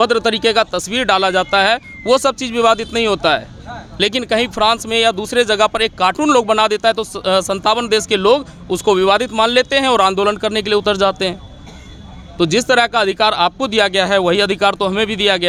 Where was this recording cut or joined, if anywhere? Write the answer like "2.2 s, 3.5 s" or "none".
none

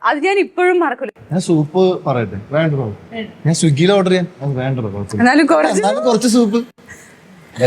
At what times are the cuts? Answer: 1.0 s

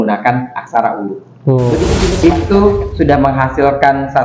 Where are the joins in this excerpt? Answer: 2.1 s

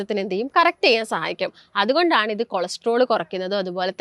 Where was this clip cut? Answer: none

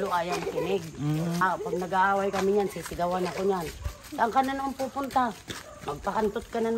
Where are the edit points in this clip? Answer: 1.4 s

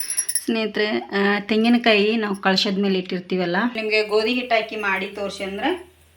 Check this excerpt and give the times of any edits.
3.8 s

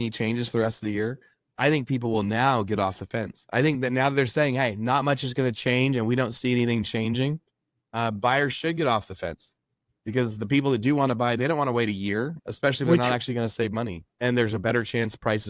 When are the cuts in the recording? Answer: none

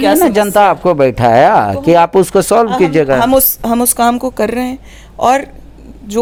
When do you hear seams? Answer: none

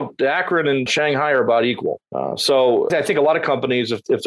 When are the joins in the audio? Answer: 0.9 s, 2.1 s, 2.9 s

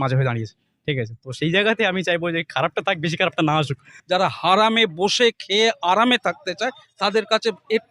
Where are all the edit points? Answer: 3.9 s

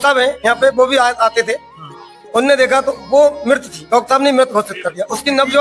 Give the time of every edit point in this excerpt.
none

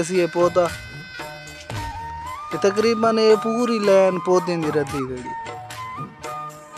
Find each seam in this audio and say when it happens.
none

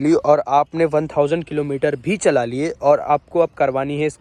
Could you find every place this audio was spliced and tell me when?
none

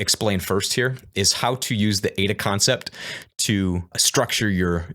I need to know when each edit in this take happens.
4.0 s

